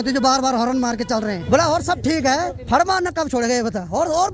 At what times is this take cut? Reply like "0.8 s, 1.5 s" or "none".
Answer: 1.4 s, 2.6 s